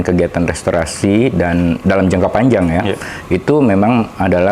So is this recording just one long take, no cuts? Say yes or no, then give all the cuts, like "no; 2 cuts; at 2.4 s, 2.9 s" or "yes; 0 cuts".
yes; 0 cuts